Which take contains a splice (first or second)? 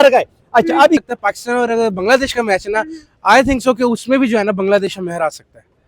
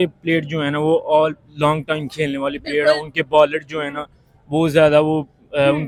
first